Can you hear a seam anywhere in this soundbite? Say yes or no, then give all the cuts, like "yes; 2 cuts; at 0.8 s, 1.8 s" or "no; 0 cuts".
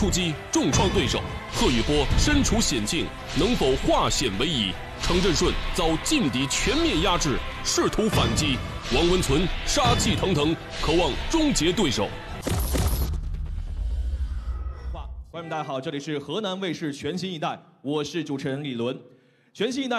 yes; 1 cut; at 14.7 s